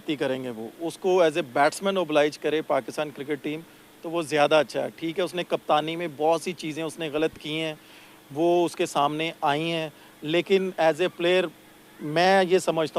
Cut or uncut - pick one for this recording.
uncut